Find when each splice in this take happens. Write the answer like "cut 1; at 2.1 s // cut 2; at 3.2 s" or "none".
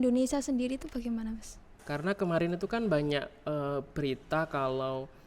cut 1; at 1.7 s